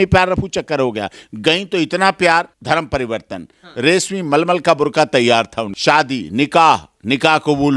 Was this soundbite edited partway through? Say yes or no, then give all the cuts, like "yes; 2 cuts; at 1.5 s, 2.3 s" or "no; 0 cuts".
yes; 2 cuts; at 2.5 s, 5.6 s